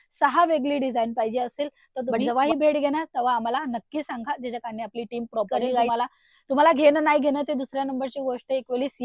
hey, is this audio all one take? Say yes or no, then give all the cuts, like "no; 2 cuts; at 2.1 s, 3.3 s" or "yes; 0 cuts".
no; 2 cuts; at 2.1 s, 5.9 s